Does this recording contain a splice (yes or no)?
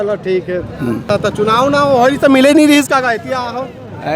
yes